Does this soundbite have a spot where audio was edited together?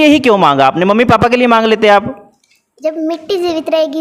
no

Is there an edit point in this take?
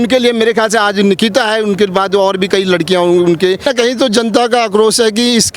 yes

